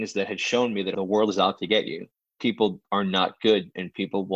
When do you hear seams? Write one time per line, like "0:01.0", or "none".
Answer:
0:00.9